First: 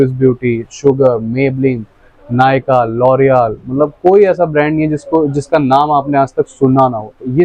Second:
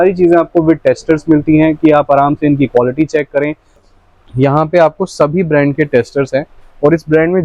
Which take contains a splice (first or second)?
second